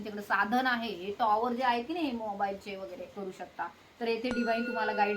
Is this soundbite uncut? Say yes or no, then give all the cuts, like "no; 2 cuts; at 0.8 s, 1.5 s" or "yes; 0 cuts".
no; 1 cut; at 3.2 s